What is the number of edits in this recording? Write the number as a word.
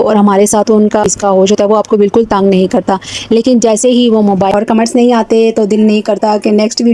two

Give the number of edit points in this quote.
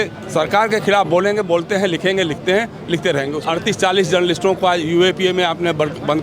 one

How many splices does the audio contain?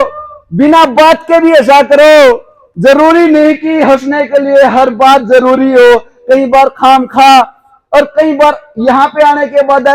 zero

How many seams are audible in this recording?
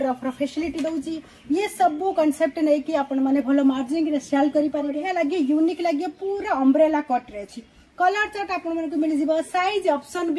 one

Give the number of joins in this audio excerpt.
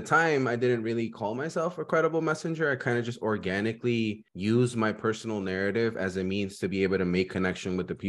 one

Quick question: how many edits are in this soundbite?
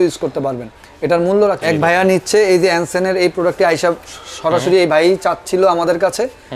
one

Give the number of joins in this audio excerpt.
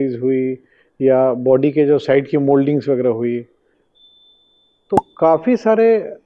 zero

